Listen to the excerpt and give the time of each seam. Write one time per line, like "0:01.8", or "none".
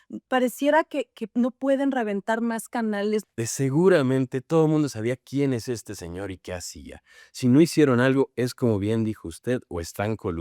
0:03.2